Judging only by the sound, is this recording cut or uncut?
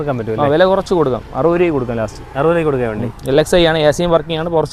uncut